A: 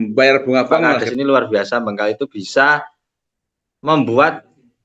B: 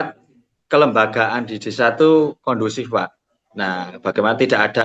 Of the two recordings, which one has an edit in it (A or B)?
A